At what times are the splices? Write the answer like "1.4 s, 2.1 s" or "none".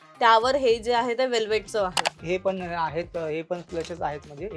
2.1 s